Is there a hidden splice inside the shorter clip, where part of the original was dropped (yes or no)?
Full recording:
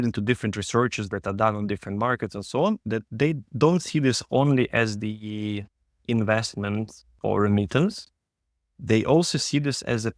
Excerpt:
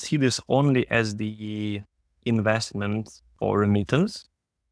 no